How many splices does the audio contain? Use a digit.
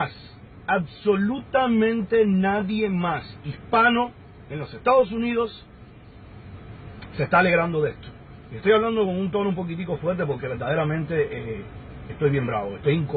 1